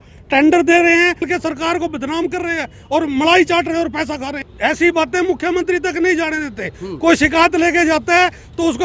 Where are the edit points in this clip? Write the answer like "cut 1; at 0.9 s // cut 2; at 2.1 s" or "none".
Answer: cut 1; at 1.3 s // cut 2; at 4.4 s